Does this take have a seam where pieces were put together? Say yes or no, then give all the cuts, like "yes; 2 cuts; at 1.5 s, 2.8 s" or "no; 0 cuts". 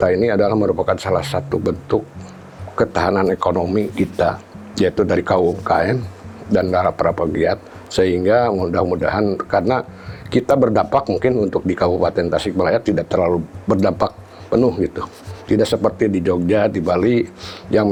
no; 0 cuts